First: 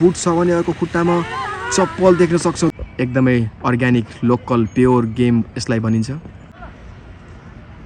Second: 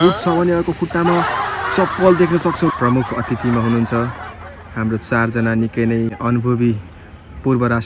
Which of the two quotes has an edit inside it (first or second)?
second